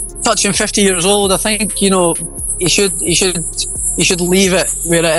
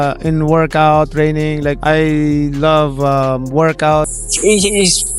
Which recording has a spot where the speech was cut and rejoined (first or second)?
second